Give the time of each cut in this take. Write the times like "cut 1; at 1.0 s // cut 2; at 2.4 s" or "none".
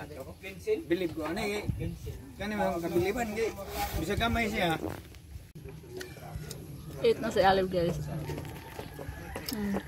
cut 1; at 5.5 s